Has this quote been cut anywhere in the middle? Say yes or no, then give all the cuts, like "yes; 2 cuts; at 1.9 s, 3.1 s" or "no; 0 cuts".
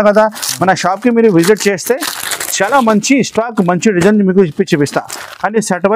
no; 0 cuts